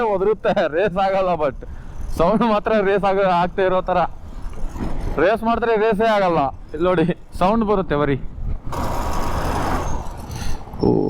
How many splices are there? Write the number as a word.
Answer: one